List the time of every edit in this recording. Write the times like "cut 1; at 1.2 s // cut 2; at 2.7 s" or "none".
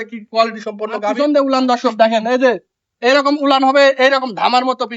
cut 1; at 1.2 s